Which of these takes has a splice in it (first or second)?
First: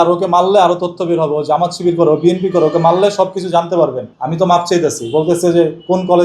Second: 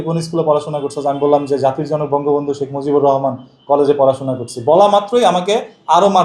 first